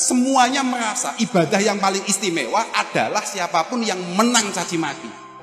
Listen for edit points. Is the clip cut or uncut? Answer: uncut